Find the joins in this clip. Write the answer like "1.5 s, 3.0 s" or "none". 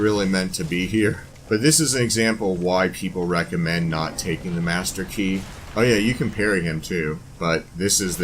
1.3 s, 5.6 s, 7.3 s